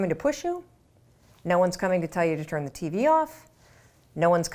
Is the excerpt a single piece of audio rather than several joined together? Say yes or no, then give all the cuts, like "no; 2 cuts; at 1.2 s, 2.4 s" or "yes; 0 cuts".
yes; 0 cuts